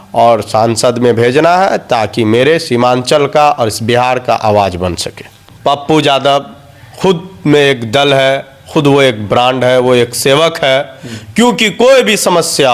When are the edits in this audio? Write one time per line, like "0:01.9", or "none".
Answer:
0:05.4